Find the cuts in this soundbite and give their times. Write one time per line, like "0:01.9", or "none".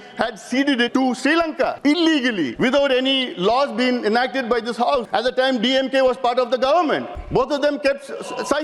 0:00.9
0:01.8
0:02.5
0:05.1
0:07.2